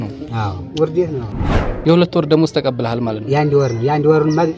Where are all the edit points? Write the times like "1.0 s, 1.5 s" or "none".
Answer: 1.2 s